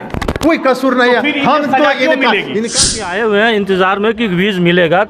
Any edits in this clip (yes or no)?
yes